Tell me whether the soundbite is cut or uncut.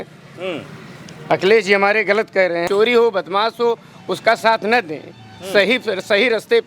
cut